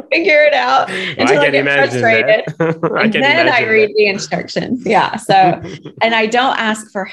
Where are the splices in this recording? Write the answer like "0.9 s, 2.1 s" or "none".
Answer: none